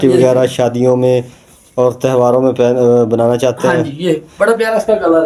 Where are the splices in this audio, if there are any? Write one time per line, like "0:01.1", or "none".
none